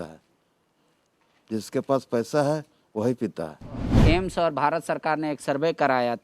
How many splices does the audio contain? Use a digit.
1